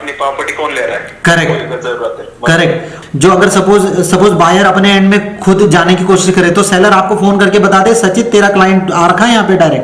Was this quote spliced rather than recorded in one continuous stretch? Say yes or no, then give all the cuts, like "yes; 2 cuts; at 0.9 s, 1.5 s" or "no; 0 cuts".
yes; 1 cut; at 2.9 s